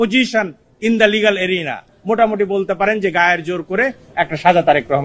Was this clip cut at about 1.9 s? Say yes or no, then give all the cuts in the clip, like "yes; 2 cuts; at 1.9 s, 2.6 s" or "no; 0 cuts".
yes; 1 cut; at 1.9 s